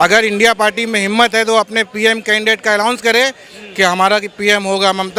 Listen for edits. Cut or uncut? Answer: uncut